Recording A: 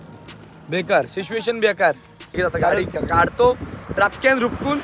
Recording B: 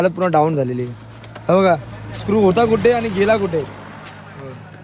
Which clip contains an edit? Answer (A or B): A